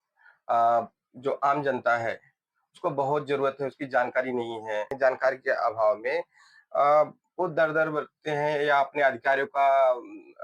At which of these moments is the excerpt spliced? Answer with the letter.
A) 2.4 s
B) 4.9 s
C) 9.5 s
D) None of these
B